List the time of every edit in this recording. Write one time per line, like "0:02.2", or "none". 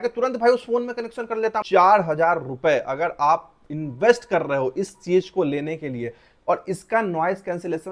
0:01.6
0:06.3